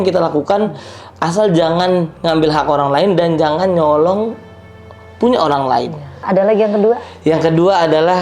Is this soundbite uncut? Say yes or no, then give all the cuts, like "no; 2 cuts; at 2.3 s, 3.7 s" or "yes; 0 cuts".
no; 1 cut; at 6.2 s